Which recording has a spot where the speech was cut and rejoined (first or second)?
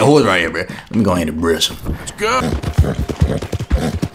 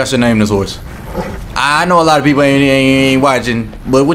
first